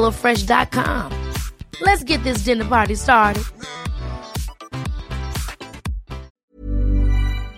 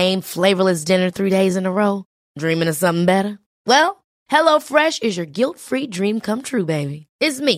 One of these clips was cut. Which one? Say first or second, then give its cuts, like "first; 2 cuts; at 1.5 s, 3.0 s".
first; 1 cut; at 6.3 s